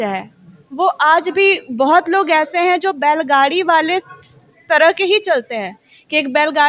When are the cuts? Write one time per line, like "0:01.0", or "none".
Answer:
none